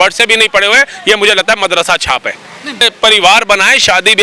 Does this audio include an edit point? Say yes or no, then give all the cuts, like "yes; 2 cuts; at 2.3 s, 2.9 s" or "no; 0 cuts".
yes; 1 cut; at 2.9 s